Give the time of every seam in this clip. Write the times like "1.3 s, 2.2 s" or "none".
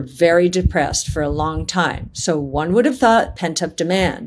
3.3 s